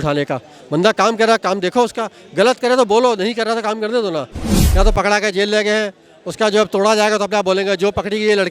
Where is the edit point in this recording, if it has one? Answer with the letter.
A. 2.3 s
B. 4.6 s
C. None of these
B